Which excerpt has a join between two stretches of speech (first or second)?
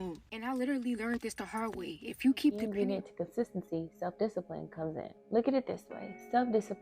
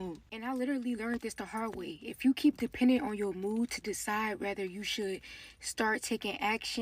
first